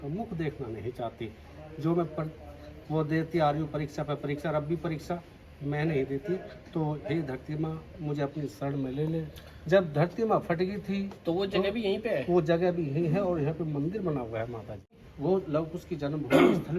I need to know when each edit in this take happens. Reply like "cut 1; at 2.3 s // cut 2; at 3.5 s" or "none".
cut 1; at 14.9 s